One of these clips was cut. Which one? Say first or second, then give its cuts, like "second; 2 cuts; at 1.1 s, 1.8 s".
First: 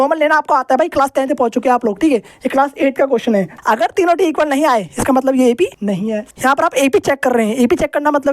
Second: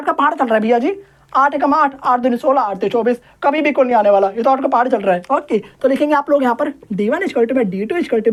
first; 2 cuts; at 3.5 s, 6.1 s